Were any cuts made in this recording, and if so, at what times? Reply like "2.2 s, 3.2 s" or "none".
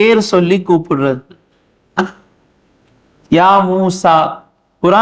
none